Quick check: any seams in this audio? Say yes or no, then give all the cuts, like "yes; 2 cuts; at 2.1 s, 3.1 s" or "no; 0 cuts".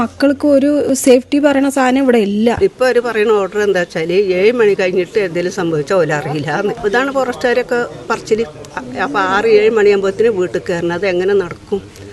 yes; 3 cuts; at 2.6 s, 6.8 s, 8.7 s